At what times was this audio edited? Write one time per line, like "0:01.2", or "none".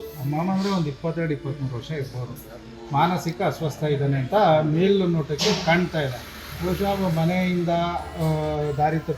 none